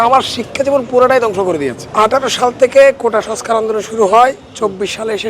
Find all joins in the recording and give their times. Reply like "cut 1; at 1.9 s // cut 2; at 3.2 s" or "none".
none